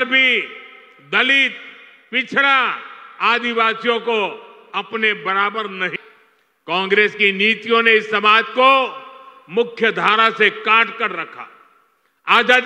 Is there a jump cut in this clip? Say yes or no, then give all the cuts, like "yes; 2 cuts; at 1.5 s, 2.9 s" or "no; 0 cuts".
yes; 1 cut; at 5.9 s